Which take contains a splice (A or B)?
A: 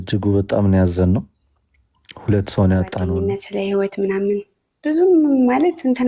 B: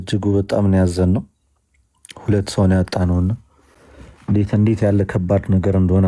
A